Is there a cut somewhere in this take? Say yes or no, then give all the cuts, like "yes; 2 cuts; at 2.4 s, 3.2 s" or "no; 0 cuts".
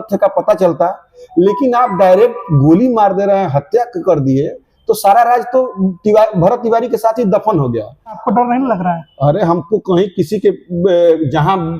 yes; 1 cut; at 8.2 s